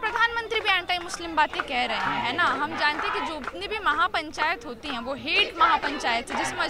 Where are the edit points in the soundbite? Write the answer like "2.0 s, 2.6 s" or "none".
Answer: none